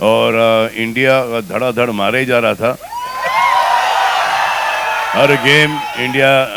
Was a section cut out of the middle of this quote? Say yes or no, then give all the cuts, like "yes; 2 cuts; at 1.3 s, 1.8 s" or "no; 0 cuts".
no; 0 cuts